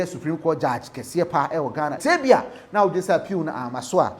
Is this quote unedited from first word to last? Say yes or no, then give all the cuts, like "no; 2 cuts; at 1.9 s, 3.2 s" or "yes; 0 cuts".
no; 1 cut; at 2.0 s